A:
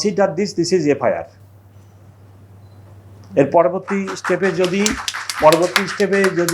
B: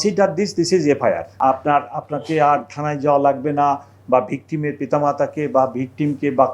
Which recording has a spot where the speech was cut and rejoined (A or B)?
B